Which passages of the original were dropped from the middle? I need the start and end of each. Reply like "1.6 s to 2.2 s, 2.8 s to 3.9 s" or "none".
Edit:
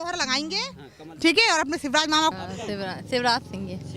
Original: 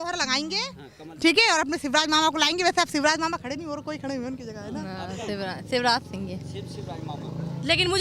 2.3 s to 4.9 s